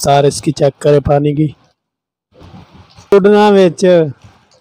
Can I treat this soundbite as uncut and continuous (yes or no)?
no